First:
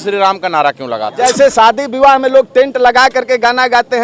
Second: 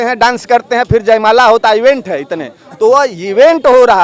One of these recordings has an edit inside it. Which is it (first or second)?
first